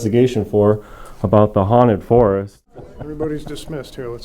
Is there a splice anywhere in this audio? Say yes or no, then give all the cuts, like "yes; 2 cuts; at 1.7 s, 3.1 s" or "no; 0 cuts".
yes; 1 cut; at 2.8 s